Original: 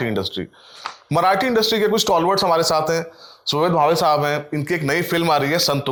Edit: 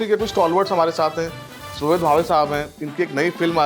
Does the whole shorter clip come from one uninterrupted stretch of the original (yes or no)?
yes